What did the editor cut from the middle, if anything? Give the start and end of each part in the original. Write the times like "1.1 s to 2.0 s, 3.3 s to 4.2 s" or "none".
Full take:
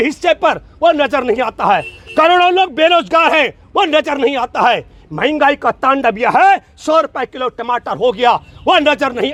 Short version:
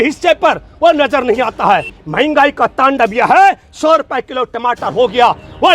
2.0 s to 5.0 s

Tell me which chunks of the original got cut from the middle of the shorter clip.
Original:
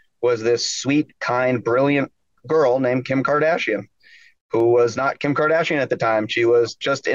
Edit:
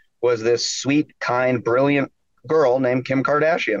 none

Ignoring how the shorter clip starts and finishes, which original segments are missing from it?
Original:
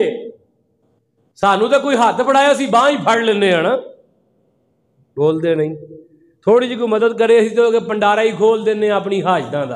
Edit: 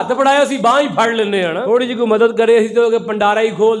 3.7 s to 6.4 s

